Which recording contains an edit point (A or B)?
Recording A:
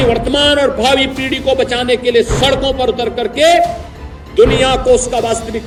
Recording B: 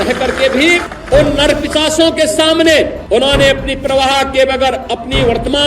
B